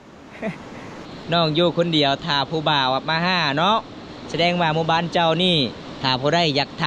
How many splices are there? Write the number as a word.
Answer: one